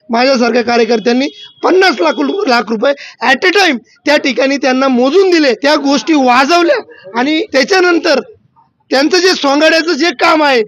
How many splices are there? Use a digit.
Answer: 2